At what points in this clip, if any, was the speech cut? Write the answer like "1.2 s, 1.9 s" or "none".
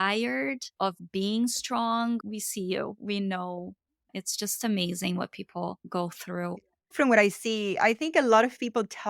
4.2 s